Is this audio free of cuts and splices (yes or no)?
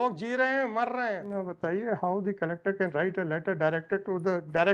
no